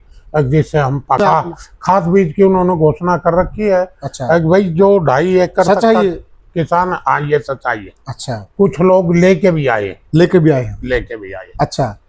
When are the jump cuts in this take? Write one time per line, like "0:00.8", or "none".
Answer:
0:01.2